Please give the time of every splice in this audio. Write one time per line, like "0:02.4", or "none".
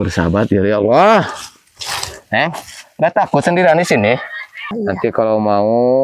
0:04.7